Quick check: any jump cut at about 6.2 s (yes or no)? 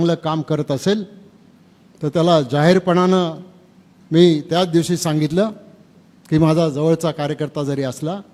no